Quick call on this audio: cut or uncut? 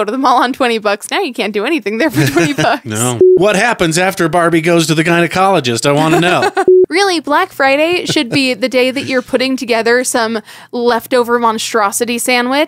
cut